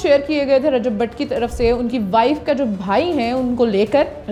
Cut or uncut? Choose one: uncut